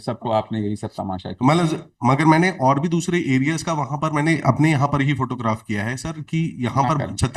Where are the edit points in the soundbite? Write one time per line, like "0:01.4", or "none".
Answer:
none